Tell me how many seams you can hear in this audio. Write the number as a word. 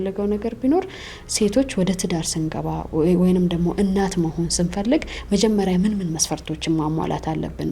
zero